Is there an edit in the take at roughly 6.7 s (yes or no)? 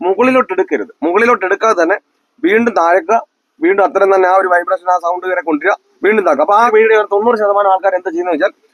yes